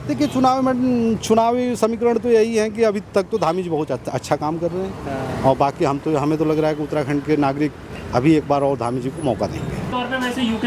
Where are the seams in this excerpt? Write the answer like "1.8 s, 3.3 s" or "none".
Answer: 9.8 s